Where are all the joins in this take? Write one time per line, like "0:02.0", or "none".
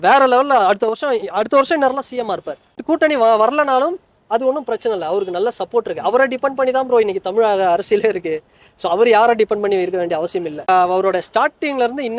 0:02.7
0:10.7